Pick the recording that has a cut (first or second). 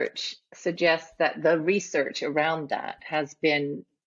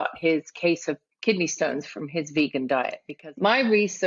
second